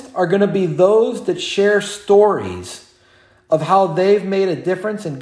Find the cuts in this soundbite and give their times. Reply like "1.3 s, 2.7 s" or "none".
none